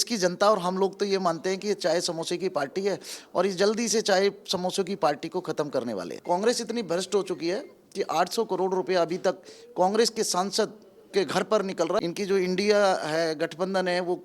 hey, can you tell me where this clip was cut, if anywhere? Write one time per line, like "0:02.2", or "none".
0:06.1
0:12.0